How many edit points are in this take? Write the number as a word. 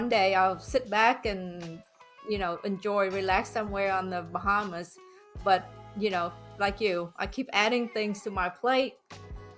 zero